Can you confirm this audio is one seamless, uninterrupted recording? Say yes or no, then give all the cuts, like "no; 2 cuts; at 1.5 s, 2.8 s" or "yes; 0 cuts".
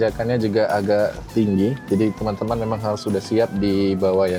yes; 0 cuts